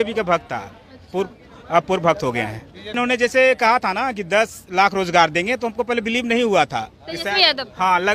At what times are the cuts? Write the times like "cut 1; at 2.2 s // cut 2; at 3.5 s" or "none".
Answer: cut 1; at 3.0 s